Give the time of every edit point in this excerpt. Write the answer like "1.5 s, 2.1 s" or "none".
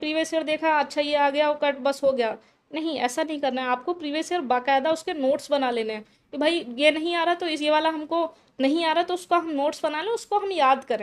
none